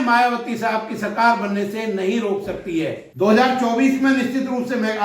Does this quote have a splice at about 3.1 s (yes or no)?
yes